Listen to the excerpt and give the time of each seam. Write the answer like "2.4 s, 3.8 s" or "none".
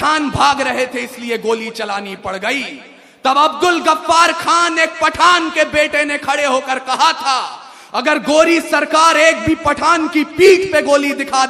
none